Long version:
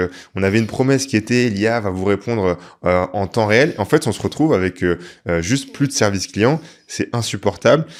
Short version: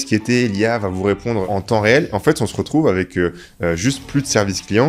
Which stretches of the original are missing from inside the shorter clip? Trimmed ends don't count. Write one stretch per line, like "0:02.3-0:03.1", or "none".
0:02.5-0:03.1